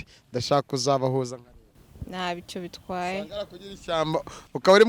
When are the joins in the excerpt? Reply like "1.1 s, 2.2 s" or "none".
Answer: none